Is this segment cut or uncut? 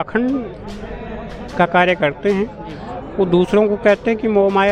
uncut